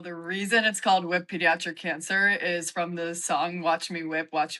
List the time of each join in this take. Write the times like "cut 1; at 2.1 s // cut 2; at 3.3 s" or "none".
none